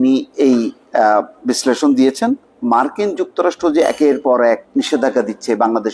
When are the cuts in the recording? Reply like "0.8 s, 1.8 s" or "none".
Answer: 2.5 s, 4.6 s